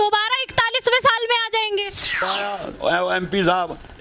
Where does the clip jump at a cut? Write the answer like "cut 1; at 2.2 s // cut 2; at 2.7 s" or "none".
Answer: cut 1; at 2.3 s